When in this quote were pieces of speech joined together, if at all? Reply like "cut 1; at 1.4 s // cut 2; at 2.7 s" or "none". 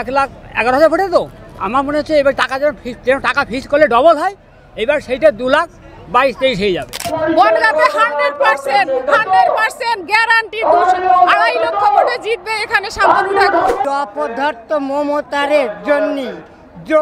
cut 1; at 7.1 s // cut 2; at 13.8 s